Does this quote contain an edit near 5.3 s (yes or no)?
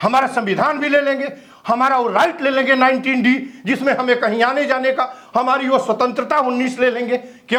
no